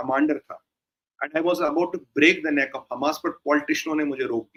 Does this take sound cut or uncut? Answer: uncut